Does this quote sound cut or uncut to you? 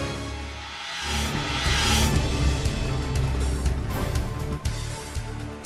uncut